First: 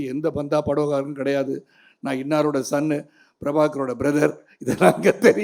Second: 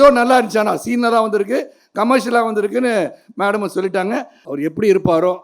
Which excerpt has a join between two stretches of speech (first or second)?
second